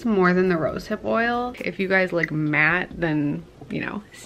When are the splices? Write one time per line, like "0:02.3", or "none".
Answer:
0:01.5

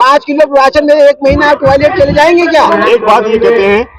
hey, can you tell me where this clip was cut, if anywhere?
0:02.5

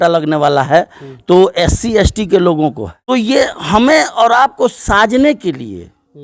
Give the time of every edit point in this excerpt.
0:02.9

